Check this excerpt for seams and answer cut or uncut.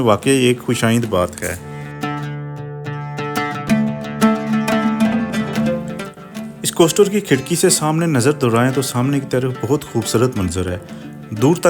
uncut